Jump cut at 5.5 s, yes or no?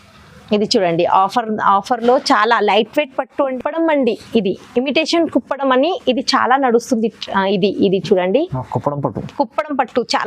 no